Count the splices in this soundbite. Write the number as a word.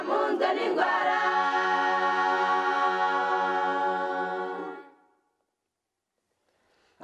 zero